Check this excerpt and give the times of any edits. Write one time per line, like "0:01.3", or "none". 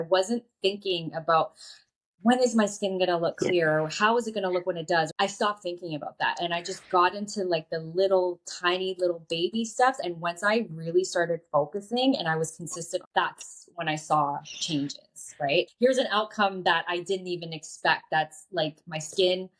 0:05.1
0:10.0
0:13.1
0:15.7